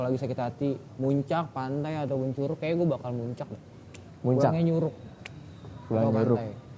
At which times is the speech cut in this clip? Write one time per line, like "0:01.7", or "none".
none